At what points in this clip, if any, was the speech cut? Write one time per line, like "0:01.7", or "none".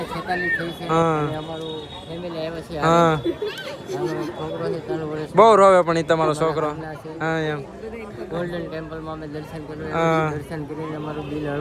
none